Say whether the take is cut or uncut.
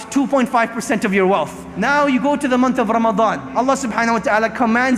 cut